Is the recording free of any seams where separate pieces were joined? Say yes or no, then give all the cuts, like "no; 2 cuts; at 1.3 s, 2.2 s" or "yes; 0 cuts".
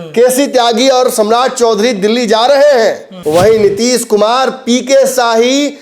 no; 1 cut; at 3.1 s